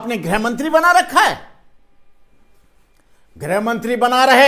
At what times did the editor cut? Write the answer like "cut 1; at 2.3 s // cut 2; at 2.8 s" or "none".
none